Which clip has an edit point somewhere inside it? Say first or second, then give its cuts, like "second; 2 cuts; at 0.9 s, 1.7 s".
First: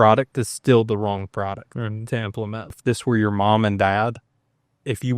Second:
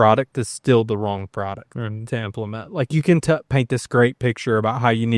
first; 1 cut; at 2.7 s